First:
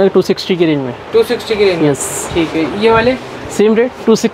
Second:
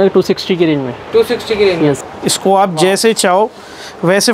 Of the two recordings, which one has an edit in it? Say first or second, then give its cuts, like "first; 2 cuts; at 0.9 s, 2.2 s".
second; 1 cut; at 2.1 s